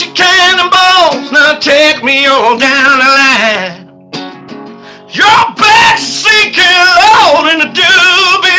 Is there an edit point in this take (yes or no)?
no